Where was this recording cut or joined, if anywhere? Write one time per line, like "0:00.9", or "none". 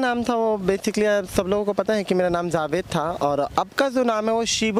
none